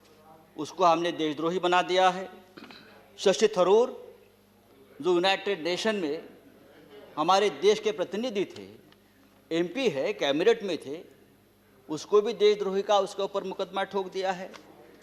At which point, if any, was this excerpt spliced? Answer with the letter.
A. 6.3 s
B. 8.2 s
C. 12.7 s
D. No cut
D